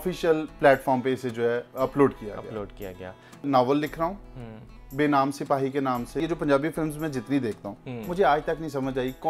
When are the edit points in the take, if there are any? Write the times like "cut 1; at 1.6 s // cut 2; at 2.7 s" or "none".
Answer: cut 1; at 3.4 s // cut 2; at 6.2 s